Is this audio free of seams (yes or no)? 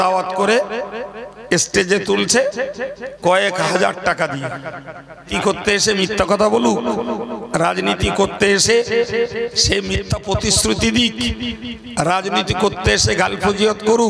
no